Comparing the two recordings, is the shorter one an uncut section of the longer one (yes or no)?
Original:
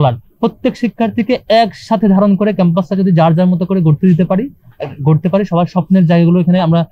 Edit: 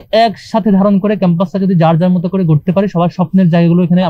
no